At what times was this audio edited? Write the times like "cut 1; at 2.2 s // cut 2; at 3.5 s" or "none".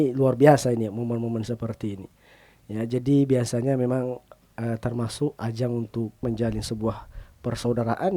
cut 1; at 6.2 s